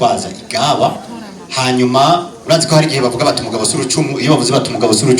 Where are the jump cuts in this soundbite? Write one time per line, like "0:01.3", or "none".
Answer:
0:02.3